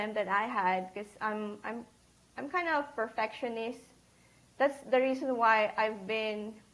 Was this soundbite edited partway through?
no; 0 cuts

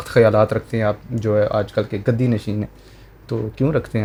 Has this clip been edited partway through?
no; 0 cuts

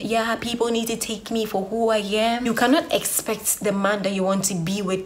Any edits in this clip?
yes; 1 cut; at 2.4 s

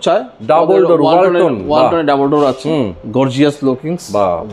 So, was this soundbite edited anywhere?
no; 0 cuts

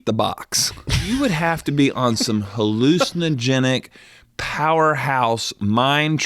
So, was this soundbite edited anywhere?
yes; 1 cut; at 1.0 s

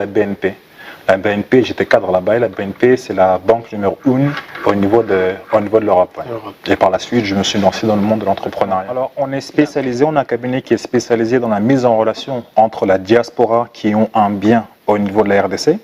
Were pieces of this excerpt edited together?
yes; 1 cut; at 9.0 s

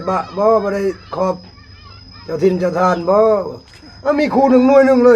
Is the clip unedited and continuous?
yes; 0 cuts

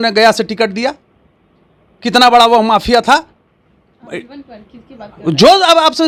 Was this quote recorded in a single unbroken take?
yes; 0 cuts

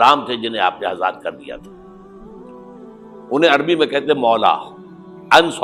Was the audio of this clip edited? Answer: no; 0 cuts

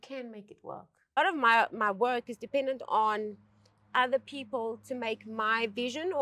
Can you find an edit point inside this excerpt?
yes; 1 cut; at 1.2 s

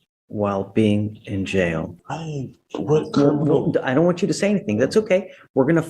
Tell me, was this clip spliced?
yes; 1 cut; at 2.0 s

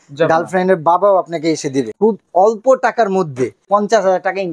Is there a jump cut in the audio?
yes; 2 cuts; at 1.9 s, 3.7 s

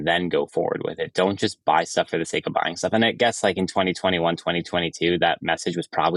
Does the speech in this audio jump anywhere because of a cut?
no; 0 cuts

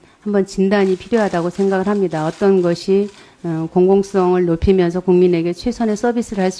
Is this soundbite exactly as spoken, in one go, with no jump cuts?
no; 1 cut; at 5.4 s

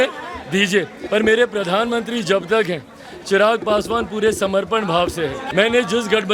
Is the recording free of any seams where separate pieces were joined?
no; 2 cuts; at 1.0 s, 5.4 s

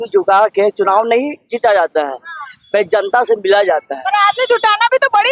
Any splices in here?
no; 0 cuts

